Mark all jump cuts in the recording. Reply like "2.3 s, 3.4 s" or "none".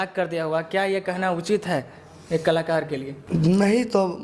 3.1 s